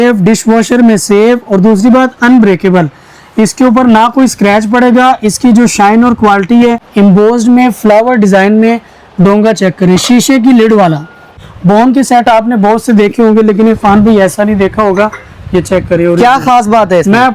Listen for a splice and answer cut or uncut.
cut